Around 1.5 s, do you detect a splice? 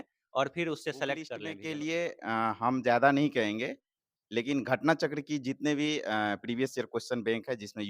yes; 1 cut; at 1.5 s

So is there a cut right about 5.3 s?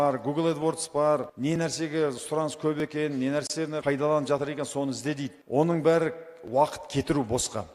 yes; 3 cuts; at 1.3 s, 3.8 s, 5.3 s

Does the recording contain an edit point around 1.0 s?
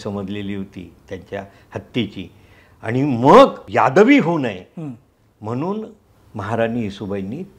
no; 1 cut; at 3.6 s

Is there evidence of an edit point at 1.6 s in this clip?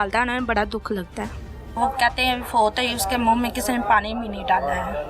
yes; 1 cut; at 1.6 s

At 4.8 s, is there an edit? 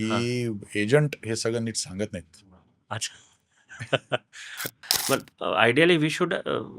yes; 1 cut; at 4.8 s

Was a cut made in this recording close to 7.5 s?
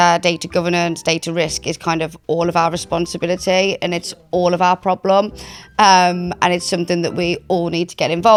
no; 0 cuts

